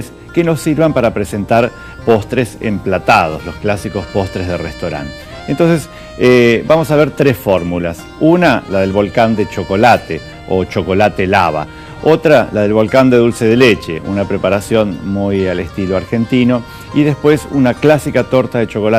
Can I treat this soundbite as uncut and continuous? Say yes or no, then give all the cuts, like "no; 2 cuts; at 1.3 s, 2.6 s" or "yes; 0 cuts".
yes; 0 cuts